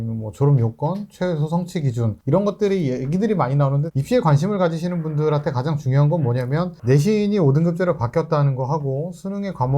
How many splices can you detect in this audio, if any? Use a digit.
1